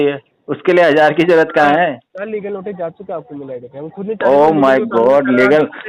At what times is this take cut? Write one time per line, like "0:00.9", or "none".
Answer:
0:02.1

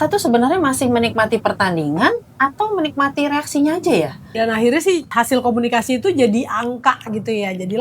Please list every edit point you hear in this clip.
0:04.2
0:05.1

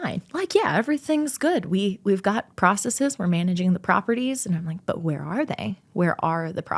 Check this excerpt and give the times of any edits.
none

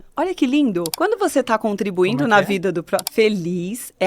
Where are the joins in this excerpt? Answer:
0:00.9
0:03.1

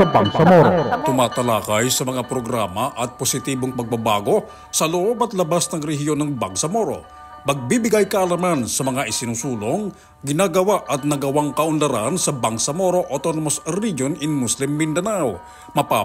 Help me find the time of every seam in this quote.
none

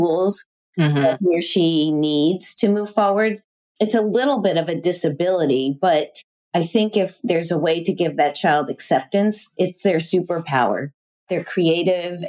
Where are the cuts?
0:11.2

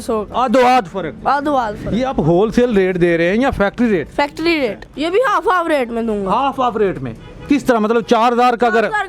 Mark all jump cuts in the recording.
0:01.9
0:04.9

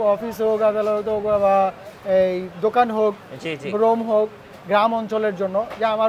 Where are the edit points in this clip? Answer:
none

